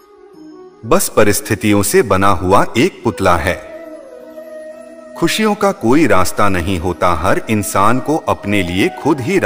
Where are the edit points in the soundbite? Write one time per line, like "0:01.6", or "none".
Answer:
0:03.8
0:05.2